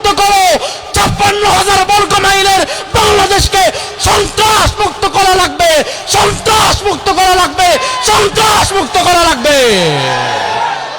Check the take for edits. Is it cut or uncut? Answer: uncut